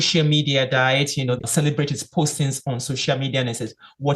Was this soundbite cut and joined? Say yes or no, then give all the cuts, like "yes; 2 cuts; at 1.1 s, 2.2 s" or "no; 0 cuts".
yes; 1 cut; at 1.4 s